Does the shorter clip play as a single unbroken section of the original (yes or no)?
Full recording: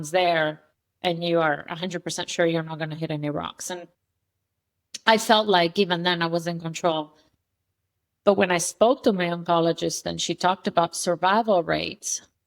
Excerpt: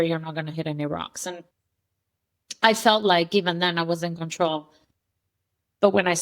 yes